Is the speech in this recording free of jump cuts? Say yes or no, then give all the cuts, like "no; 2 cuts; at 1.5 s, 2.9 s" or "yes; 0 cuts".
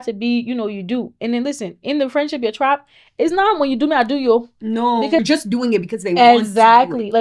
no; 1 cut; at 5.2 s